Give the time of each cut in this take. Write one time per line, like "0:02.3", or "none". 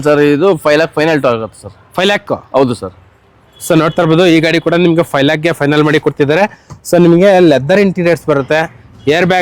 none